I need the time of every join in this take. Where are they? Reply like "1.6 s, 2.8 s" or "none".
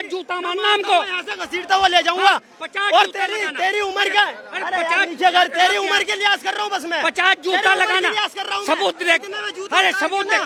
none

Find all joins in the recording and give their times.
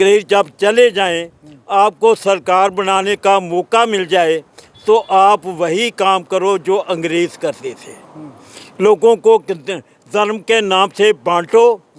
none

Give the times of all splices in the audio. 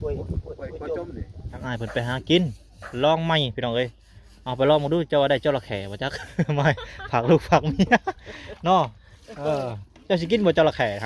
1.6 s

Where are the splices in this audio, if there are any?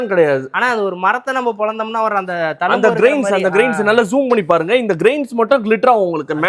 none

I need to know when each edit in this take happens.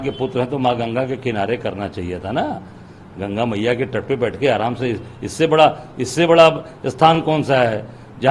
none

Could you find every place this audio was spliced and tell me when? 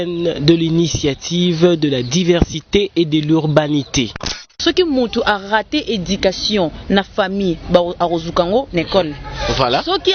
4.6 s

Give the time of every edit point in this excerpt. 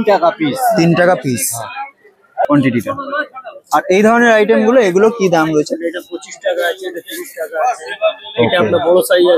2.4 s

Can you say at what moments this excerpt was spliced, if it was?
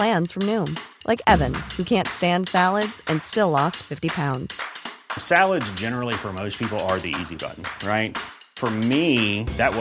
none

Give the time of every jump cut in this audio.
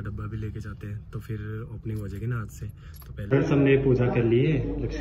3.3 s

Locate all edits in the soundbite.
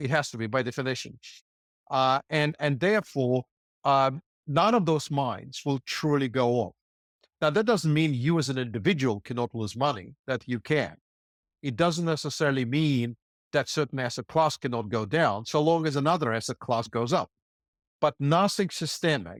none

